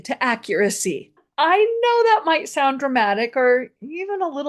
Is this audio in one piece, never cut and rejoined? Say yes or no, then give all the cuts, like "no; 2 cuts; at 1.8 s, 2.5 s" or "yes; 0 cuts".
no; 1 cut; at 1.2 s